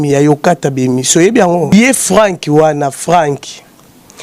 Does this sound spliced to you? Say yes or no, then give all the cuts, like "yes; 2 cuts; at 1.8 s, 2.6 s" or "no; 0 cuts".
yes; 1 cut; at 1.7 s